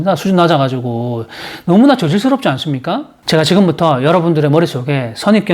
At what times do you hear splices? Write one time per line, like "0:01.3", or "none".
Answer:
0:03.2